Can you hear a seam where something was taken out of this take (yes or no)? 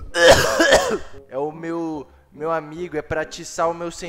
no